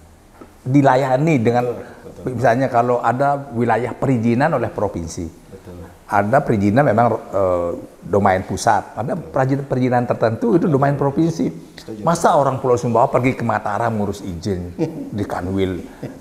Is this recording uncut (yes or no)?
yes